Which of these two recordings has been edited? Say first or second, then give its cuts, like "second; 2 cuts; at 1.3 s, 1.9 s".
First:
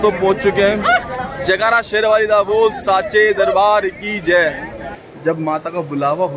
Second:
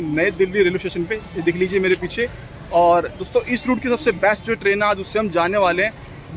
first; 1 cut; at 4.8 s